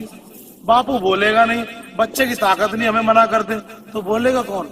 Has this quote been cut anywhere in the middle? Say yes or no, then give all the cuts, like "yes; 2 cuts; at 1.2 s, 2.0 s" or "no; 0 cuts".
no; 0 cuts